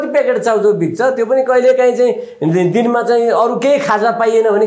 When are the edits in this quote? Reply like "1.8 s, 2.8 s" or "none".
none